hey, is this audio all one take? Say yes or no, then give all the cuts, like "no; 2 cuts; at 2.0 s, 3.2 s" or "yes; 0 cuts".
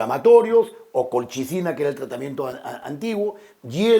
yes; 0 cuts